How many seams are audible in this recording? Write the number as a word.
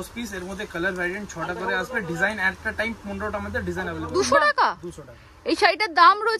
one